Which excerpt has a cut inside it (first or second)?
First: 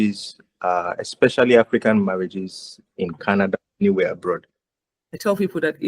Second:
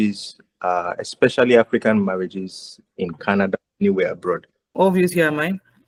first